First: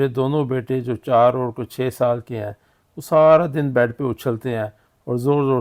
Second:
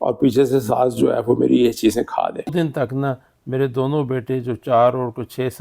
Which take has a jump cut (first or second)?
second